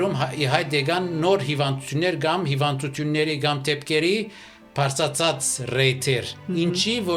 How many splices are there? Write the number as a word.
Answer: zero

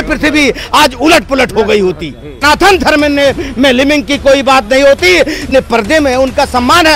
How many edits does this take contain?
two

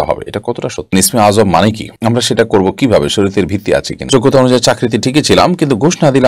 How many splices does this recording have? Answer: three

